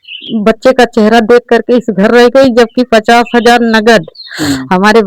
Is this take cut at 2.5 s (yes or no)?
no